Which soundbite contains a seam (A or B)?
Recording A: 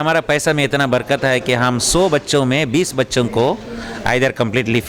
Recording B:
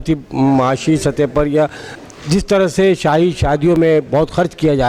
B